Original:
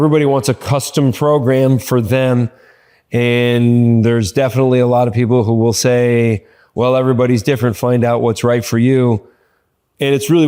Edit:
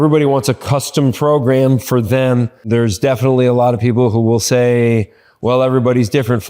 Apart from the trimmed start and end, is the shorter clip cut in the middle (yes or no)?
yes